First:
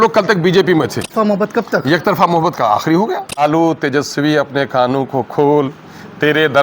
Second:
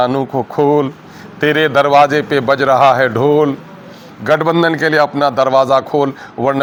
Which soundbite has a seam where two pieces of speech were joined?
first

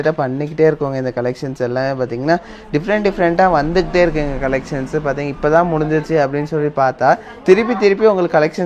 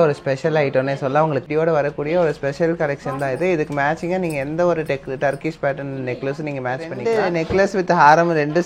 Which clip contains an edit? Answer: second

